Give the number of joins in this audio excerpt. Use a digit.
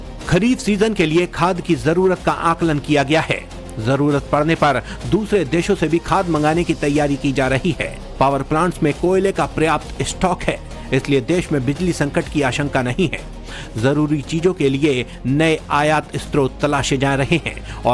0